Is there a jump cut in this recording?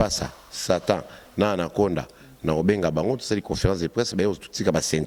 no; 0 cuts

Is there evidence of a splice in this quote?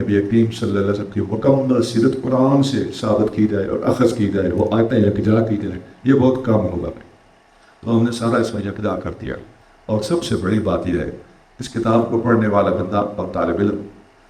yes; 1 cut; at 9.5 s

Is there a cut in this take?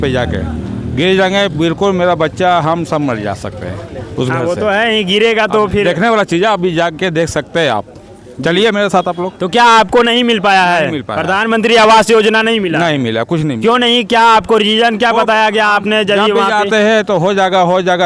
no; 0 cuts

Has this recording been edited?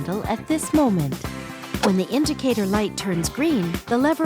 yes; 1 cut; at 1.8 s

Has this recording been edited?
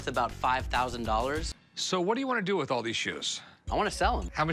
yes; 1 cut; at 1.5 s

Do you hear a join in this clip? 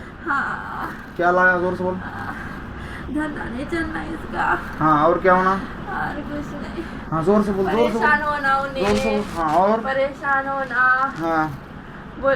no; 0 cuts

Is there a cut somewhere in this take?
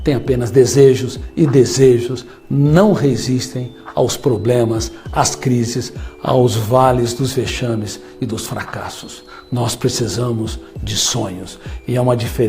yes; 1 cut; at 1.2 s

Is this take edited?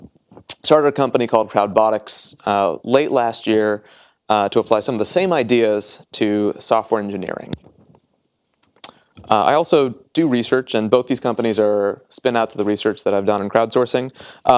yes; 1 cut; at 11.0 s

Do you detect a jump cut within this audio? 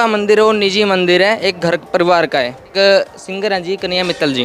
yes; 1 cut; at 2.7 s

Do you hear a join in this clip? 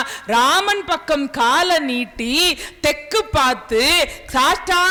no; 0 cuts

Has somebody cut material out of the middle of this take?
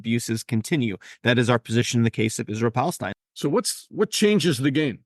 yes; 1 cut; at 3.1 s

